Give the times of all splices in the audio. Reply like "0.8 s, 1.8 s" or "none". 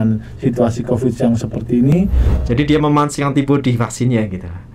2.0 s